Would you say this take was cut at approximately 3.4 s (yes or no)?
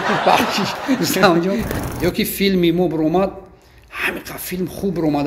no